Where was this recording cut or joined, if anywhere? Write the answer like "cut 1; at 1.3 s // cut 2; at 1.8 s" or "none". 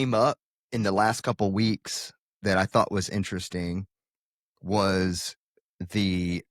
none